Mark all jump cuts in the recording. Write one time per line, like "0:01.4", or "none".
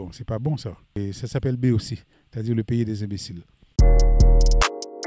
0:01.0